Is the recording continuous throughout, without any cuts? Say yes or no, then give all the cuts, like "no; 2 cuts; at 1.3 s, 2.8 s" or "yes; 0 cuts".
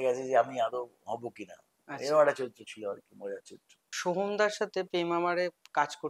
yes; 0 cuts